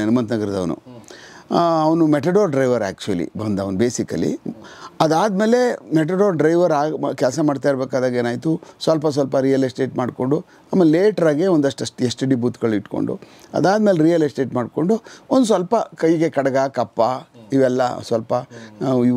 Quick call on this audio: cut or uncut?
uncut